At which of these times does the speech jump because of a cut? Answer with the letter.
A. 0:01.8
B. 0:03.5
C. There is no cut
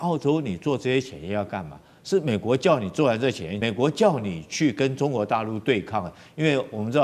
B